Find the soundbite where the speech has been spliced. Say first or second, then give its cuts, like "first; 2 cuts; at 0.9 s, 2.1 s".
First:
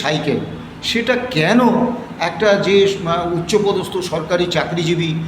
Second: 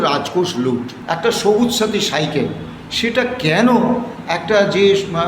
second; 1 cut; at 0.9 s